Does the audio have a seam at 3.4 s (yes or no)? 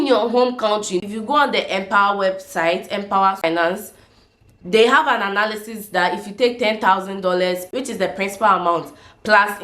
yes